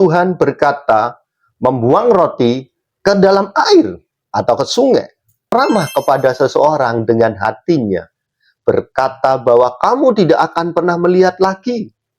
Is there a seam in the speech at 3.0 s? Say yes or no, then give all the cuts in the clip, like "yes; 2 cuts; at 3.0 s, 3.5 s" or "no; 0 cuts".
no; 1 cut; at 5.5 s